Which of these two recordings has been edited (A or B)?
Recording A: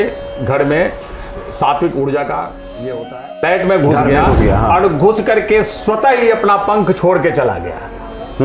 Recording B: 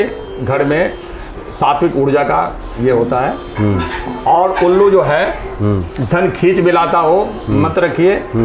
A